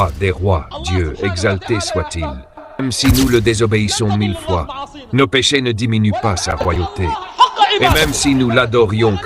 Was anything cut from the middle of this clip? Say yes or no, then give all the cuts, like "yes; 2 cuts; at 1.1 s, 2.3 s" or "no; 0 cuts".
yes; 2 cuts; at 2.8 s, 7.9 s